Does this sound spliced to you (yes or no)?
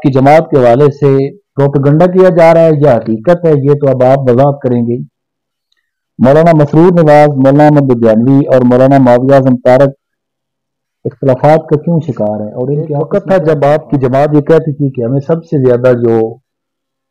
yes